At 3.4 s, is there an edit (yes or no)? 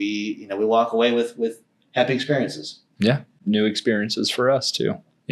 yes